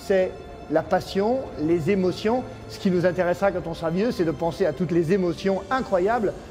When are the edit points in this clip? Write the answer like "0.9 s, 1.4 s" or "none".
2.6 s